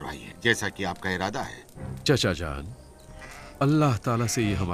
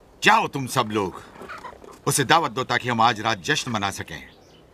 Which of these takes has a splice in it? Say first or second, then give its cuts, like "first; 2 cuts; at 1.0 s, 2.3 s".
second; 1 cut; at 2.6 s